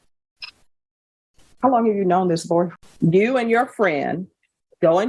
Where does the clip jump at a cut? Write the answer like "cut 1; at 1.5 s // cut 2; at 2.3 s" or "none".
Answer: cut 1; at 2.8 s